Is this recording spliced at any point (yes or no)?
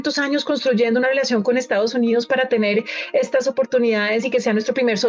no